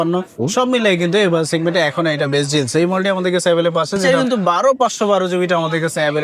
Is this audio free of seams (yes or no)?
no